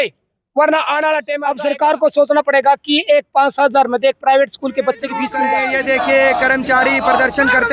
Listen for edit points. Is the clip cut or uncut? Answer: cut